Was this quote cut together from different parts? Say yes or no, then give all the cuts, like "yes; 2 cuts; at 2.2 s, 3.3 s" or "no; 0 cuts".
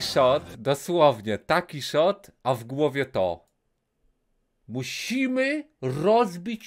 no; 0 cuts